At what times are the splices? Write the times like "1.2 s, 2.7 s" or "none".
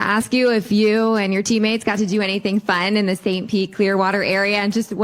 4.1 s